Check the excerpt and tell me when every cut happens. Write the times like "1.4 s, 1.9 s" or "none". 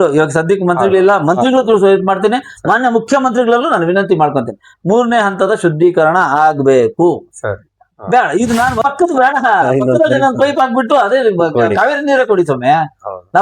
8.8 s